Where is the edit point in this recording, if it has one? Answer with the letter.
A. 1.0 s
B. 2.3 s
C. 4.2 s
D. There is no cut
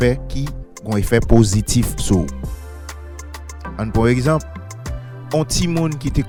D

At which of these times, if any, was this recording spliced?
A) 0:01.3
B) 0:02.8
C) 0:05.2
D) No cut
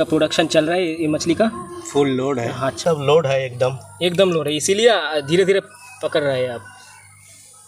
B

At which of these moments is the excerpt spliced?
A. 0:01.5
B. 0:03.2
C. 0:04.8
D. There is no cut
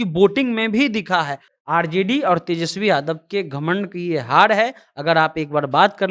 A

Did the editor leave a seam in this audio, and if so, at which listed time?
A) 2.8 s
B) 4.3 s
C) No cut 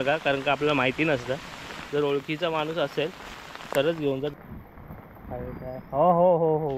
B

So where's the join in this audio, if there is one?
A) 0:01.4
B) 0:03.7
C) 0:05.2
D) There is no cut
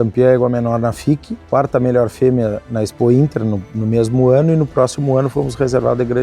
A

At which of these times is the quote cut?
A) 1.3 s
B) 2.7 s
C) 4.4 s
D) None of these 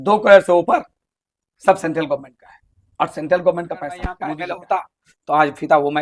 C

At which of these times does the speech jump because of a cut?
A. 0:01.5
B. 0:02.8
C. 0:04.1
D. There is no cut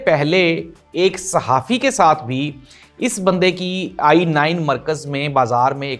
D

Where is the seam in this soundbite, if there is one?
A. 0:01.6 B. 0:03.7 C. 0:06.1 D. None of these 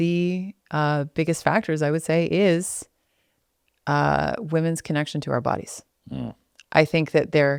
D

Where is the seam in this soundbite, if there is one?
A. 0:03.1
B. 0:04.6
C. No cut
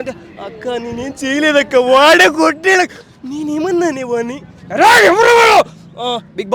C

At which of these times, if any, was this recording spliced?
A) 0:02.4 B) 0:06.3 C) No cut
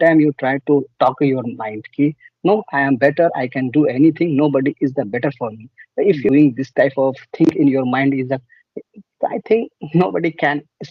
B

